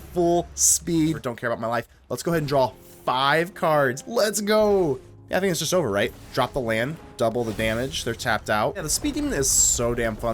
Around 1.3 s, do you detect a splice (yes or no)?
yes